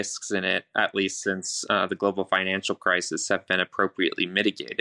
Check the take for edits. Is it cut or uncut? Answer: uncut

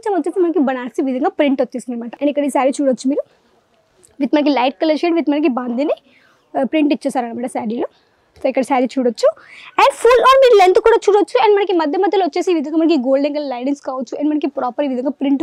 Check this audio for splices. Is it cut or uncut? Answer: cut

